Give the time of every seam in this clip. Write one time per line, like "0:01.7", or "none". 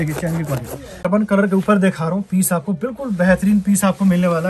0:01.0